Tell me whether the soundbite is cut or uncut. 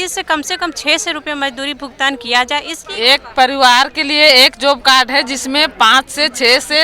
cut